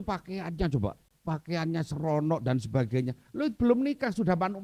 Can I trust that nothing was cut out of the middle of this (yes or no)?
no